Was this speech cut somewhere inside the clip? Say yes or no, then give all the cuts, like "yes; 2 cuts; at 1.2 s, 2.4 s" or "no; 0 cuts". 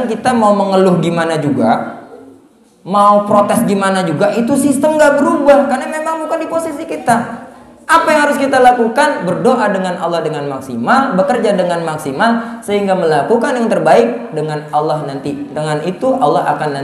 no; 0 cuts